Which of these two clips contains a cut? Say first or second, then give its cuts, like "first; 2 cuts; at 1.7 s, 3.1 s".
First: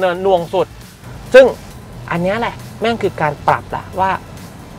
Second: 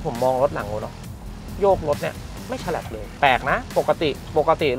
second; 1 cut; at 3.1 s